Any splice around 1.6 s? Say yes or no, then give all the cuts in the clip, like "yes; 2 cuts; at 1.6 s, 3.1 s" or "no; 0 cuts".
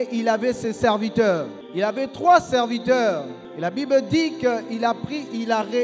yes; 2 cuts; at 1.6 s, 3.4 s